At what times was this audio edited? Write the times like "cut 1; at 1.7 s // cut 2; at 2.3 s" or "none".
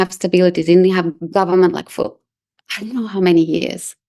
cut 1; at 1.2 s